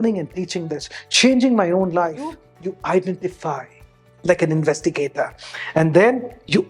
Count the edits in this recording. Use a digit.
1